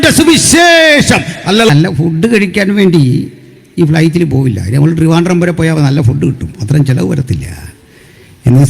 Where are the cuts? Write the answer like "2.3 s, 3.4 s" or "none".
1.7 s